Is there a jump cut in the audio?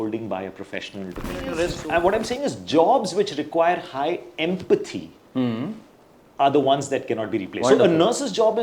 yes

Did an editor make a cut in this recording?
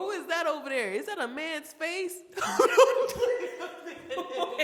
no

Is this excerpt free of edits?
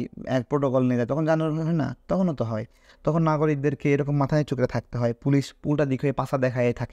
yes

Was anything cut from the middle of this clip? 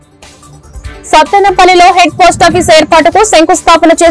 yes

